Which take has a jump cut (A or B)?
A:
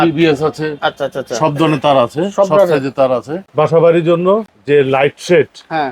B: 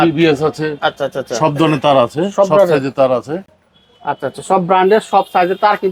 A